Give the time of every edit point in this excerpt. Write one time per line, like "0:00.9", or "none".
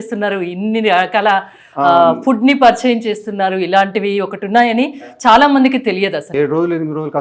0:06.3